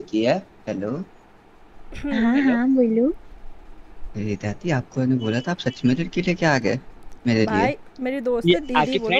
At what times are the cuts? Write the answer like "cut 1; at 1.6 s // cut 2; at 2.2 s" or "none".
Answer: none

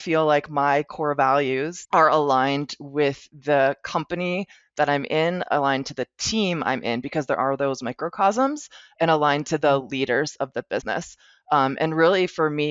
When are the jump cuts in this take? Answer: cut 1; at 1.8 s

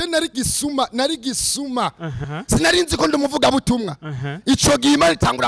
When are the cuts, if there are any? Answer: cut 1; at 2.2 s

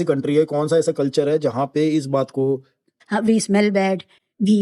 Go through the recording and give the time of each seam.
cut 1; at 3.0 s

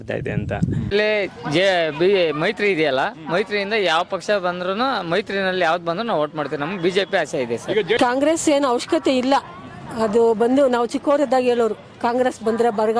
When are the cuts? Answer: cut 1; at 0.9 s // cut 2; at 8.0 s

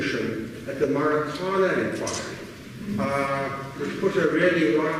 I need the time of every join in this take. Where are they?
cut 1; at 3.6 s

